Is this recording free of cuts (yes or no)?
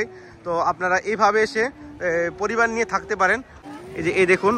no